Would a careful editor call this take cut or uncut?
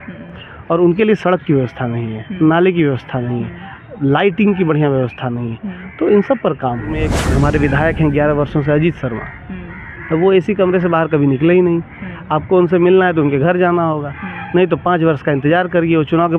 cut